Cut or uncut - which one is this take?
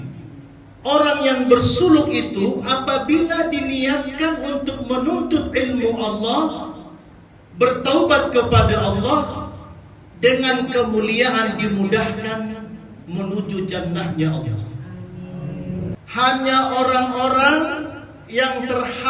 cut